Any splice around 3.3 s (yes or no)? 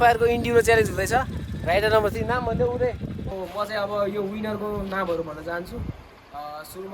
yes